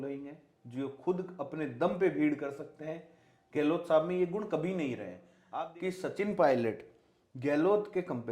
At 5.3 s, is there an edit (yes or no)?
yes